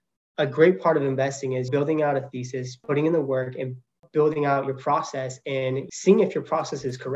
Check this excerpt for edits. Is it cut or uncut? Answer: cut